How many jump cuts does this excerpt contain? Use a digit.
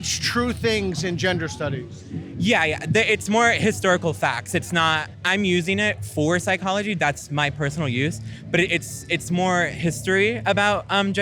1